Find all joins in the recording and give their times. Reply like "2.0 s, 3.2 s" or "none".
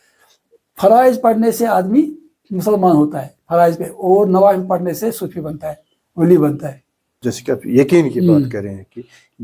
6.6 s